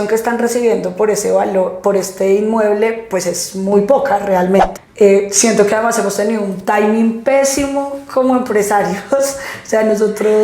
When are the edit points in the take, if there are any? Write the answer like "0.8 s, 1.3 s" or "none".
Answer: 4.8 s